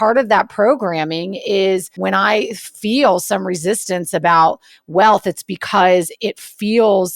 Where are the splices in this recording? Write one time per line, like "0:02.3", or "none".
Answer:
0:01.9